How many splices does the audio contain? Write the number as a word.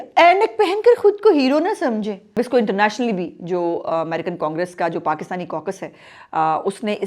one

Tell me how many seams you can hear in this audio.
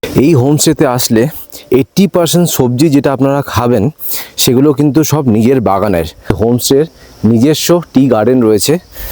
one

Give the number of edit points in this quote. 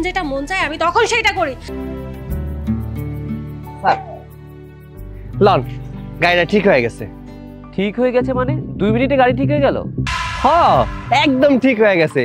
two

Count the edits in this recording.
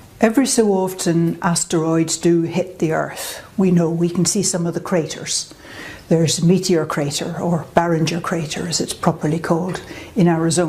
zero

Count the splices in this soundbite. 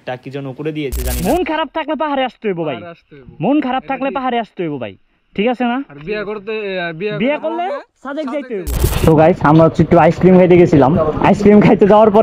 two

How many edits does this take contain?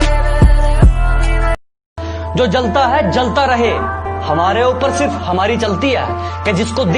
one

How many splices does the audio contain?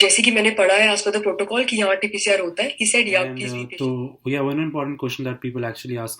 one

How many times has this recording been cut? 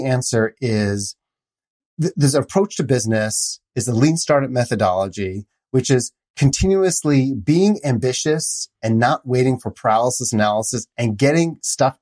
zero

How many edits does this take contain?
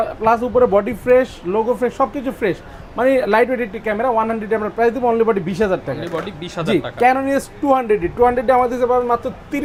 zero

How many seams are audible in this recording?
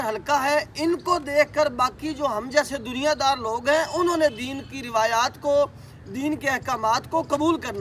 zero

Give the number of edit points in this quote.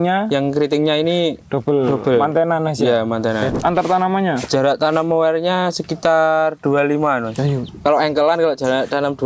three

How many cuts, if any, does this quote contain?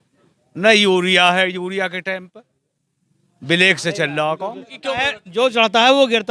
one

